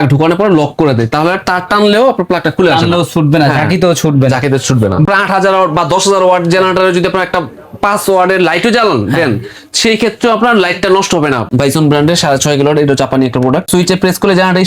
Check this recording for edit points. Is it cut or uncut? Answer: cut